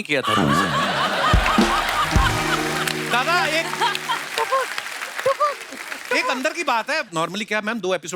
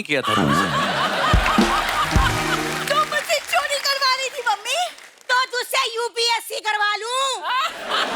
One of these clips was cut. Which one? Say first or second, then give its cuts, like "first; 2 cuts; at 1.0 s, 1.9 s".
second; 1 cut; at 2.8 s